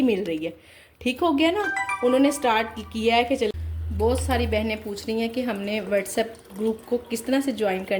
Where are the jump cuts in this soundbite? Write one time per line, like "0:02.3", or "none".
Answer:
0:03.5